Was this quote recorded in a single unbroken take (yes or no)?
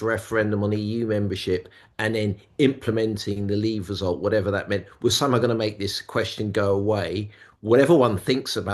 yes